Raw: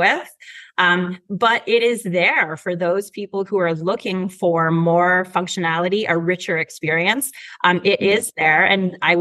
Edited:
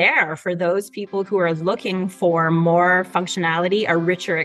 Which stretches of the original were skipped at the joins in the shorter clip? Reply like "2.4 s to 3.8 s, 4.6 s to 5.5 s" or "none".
none